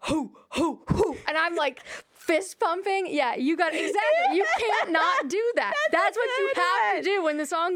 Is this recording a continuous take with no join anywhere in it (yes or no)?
yes